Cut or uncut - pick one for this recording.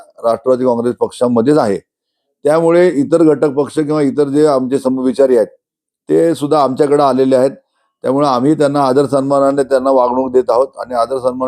uncut